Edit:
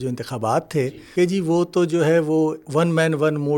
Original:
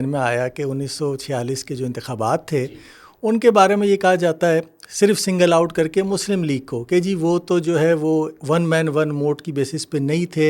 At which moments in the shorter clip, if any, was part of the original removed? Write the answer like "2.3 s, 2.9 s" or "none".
1.0 s